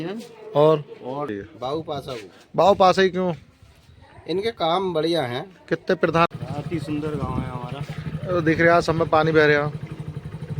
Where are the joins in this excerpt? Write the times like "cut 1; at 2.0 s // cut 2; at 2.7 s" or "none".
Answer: cut 1; at 1.3 s // cut 2; at 6.3 s